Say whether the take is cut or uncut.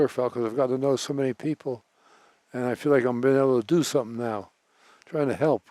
uncut